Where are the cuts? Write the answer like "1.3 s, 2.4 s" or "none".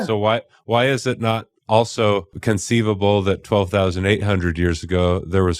2.4 s